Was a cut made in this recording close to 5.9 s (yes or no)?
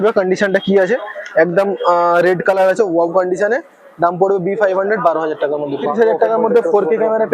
yes